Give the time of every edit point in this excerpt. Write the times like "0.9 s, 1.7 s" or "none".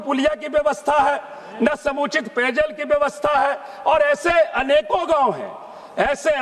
none